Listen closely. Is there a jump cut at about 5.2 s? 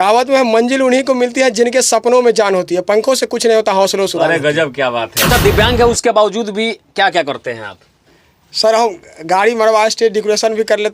yes; 1 cut; at 5.2 s

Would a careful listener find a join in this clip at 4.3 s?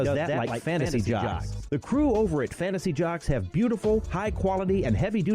no; 0 cuts

